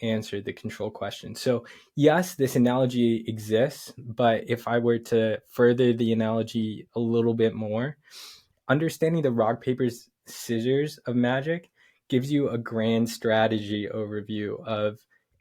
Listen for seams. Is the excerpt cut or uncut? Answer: uncut